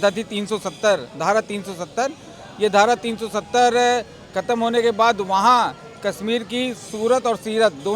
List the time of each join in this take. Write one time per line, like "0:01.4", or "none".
none

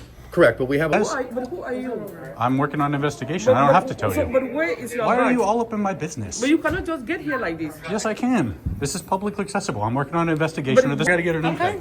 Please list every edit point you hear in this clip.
0:00.9
0:11.1

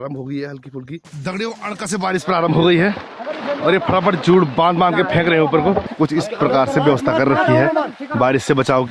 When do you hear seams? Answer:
0:01.0
0:05.9

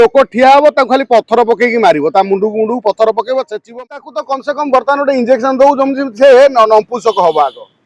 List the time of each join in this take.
0:03.8

